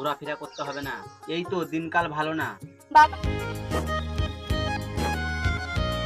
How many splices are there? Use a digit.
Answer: 1